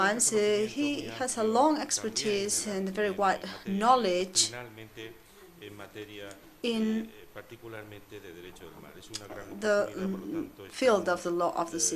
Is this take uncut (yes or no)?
yes